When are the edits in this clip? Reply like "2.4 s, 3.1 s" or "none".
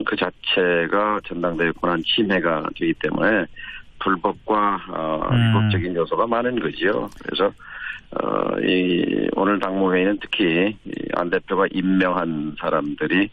none